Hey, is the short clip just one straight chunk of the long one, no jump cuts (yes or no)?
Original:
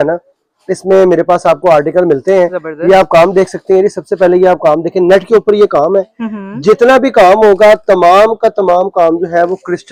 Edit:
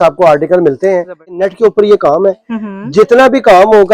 no